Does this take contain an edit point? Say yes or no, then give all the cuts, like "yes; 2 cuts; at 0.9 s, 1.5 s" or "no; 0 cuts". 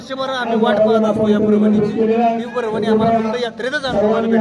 no; 0 cuts